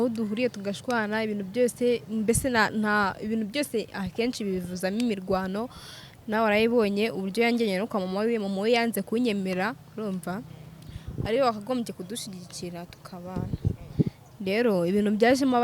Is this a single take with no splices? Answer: yes; 0 cuts

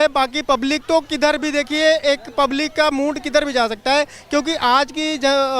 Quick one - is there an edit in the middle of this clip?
no; 0 cuts

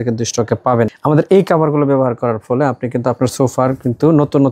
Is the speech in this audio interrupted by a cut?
yes; 1 cut; at 1.0 s

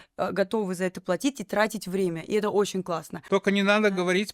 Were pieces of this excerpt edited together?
yes; 1 cut; at 3.1 s

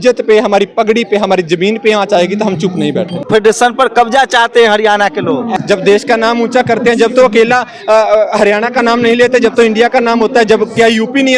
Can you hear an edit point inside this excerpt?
yes; 2 cuts; at 3.2 s, 5.5 s

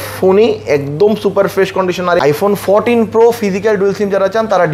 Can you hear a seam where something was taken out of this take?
yes; 1 cut; at 2.2 s

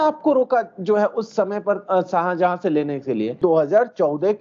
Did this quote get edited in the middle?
yes; 1 cut; at 3.4 s

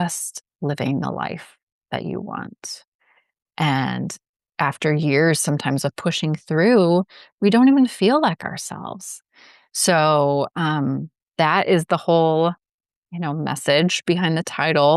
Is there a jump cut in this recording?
no; 0 cuts

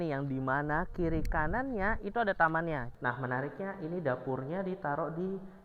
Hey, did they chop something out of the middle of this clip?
yes; 1 cut; at 2.9 s

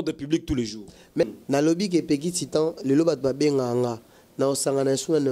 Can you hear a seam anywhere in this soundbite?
yes; 1 cut; at 1.2 s

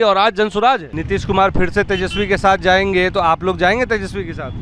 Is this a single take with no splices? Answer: no; 1 cut; at 0.9 s

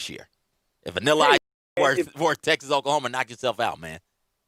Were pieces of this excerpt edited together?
no; 0 cuts

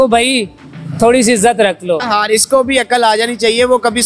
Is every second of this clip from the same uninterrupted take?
no; 1 cut; at 2.0 s

